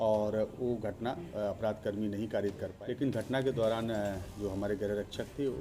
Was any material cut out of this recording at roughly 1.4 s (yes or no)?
no